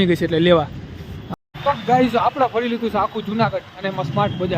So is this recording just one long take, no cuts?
no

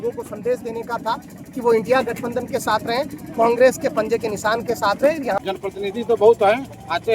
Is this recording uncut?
no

